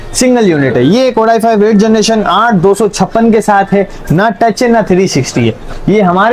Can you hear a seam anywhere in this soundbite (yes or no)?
no